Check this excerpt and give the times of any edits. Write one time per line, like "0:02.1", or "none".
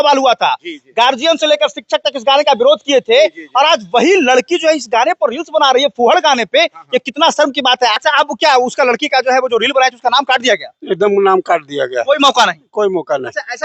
0:08.0